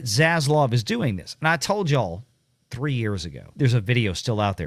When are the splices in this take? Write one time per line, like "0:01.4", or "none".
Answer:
none

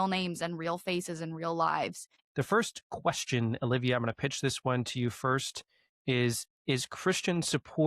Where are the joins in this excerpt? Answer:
0:02.2

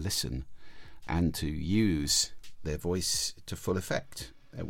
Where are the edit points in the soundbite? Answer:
0:01.0

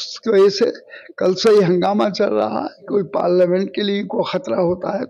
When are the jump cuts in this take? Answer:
0:02.8

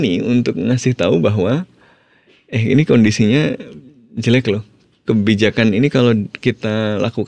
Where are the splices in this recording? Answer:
none

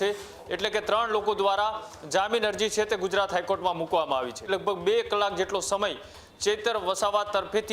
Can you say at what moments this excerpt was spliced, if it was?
0:04.5

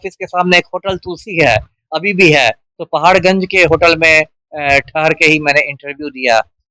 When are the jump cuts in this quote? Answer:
0:02.7

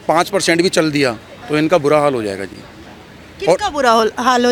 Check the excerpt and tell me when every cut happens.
none

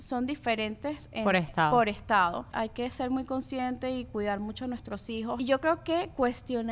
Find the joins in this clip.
0:02.5
0:05.4

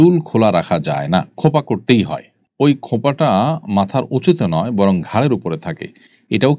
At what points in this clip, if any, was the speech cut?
0:01.3

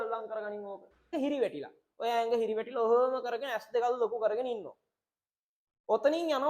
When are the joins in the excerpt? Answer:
0:01.1

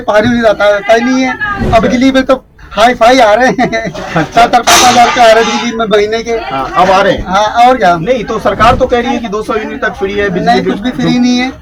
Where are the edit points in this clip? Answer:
none

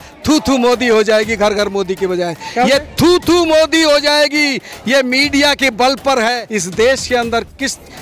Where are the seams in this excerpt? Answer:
0:06.4

